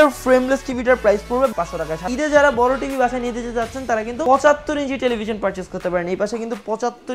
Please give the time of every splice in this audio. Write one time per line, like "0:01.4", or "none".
0:01.5